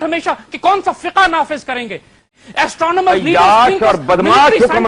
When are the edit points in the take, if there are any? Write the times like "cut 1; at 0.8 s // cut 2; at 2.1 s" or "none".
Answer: cut 1; at 2.4 s